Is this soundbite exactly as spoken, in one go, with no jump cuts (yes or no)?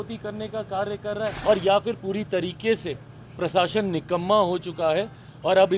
no